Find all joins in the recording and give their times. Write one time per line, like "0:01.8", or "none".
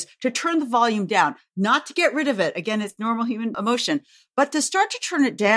0:03.6